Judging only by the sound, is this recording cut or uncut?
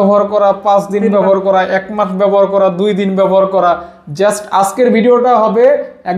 uncut